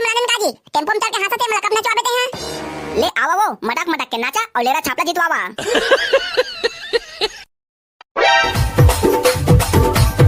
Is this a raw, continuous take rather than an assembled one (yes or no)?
yes